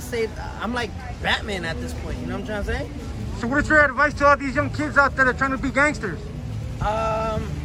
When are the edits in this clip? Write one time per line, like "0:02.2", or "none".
none